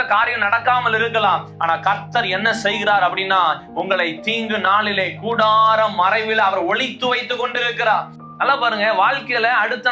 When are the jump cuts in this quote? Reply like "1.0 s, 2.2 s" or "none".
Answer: 8.2 s